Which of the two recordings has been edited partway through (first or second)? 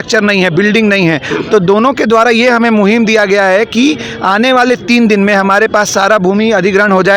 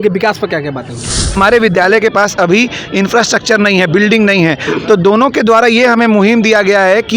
second